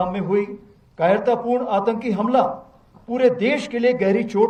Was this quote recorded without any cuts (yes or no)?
yes